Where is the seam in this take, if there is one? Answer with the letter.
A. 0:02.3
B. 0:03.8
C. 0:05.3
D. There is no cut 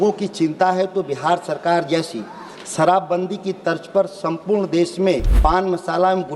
C